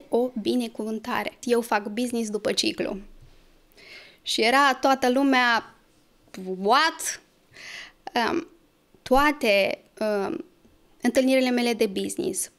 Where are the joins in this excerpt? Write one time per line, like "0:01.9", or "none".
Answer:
0:01.4

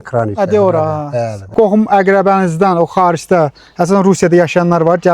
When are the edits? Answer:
0:01.5

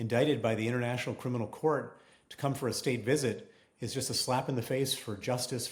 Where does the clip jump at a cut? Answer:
none

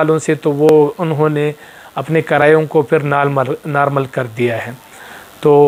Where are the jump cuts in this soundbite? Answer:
none

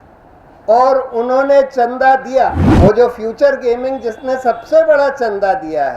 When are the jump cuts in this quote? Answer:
0:02.6

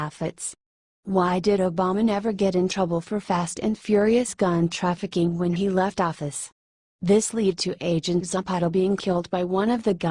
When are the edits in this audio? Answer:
0:01.7

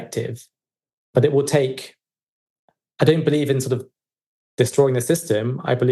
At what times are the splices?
0:01.0

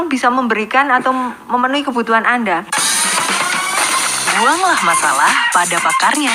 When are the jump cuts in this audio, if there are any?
0:02.8

